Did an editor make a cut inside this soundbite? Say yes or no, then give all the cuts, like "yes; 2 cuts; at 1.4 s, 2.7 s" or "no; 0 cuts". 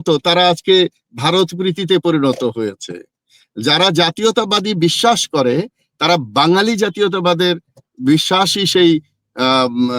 no; 0 cuts